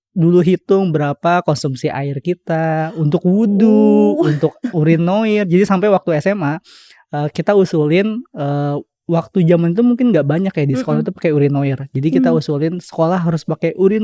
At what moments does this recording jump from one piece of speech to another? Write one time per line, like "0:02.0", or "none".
none